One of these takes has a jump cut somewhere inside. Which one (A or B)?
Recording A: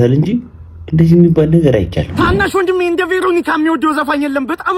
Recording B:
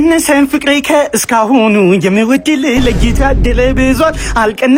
A